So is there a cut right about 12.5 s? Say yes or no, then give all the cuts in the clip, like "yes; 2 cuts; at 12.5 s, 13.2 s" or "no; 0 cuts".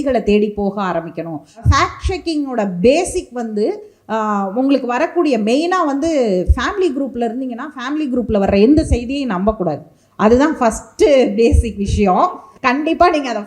yes; 2 cuts; at 1.6 s, 12.5 s